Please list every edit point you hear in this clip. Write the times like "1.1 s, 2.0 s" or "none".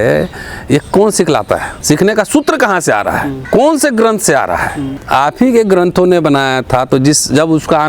1.7 s, 3.4 s, 4.9 s